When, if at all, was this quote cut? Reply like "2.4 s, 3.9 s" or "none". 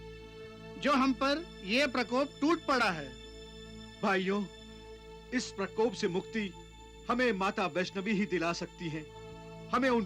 none